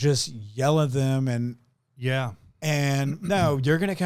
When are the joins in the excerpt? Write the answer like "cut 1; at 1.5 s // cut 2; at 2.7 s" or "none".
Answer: none